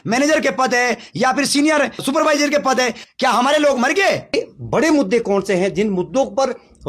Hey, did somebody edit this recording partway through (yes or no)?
yes